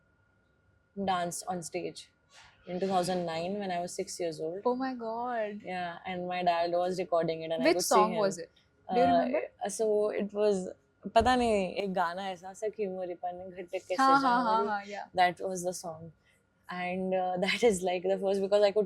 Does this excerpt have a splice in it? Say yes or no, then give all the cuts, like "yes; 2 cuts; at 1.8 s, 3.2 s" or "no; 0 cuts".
no; 0 cuts